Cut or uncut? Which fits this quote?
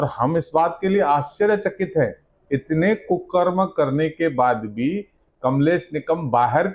uncut